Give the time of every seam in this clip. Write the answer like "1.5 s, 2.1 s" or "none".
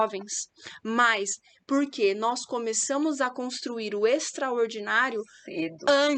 none